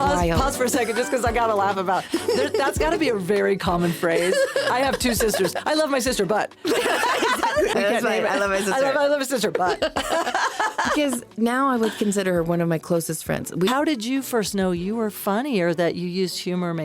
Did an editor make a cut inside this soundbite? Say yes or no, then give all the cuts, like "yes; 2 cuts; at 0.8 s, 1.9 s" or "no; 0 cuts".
yes; 2 cuts; at 7.7 s, 13.7 s